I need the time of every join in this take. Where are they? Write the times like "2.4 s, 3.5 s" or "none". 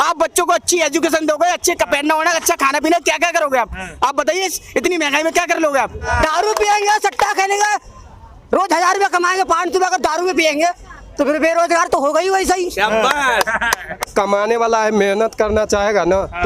6.1 s, 14.0 s